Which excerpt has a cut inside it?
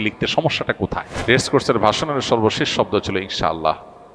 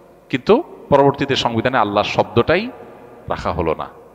first; 1 cut; at 1.1 s

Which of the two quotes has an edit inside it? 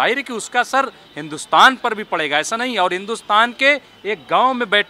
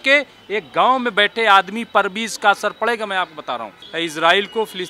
second; 1 cut; at 3.8 s

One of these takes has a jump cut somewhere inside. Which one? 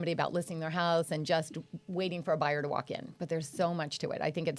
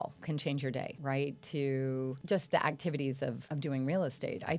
second; 3 cuts; at 0.9 s, 2.2 s, 3.5 s

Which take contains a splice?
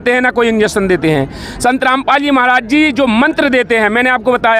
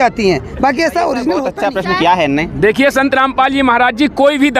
second; 1 cut; at 1.5 s

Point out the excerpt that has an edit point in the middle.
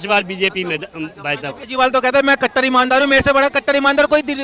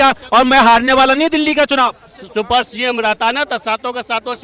first; 1 cut; at 1.6 s

